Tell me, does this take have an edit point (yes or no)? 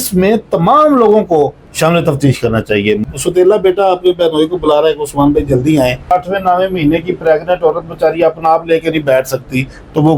yes